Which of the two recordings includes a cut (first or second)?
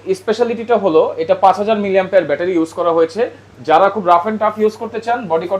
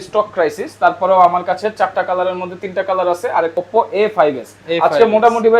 second